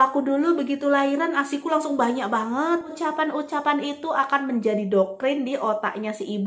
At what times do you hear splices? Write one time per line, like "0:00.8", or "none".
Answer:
0:02.9